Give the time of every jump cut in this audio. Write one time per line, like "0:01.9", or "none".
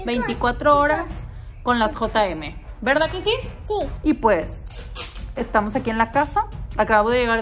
0:04.0